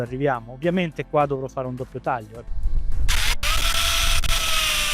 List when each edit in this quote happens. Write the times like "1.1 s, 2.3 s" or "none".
2.5 s